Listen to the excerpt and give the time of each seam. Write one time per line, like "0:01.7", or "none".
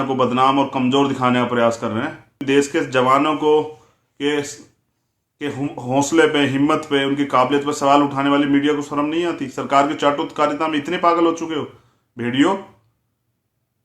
0:02.4